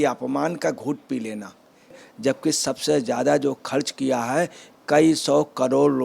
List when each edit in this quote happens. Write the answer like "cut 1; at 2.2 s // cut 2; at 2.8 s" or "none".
cut 1; at 2.0 s